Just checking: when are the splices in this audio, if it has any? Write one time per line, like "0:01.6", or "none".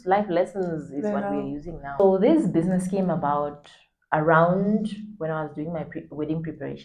0:02.0